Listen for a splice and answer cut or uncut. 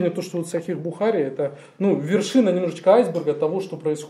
uncut